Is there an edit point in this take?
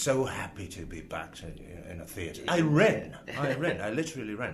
yes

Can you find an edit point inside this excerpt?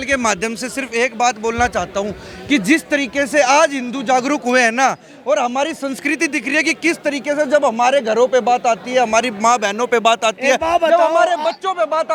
no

